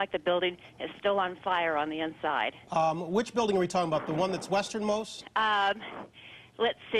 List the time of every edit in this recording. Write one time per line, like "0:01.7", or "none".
0:02.5